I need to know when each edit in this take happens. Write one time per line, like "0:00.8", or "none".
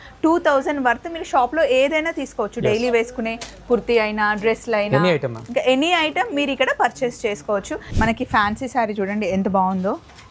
0:07.8